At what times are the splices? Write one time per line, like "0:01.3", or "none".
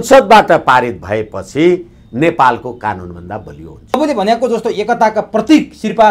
0:03.9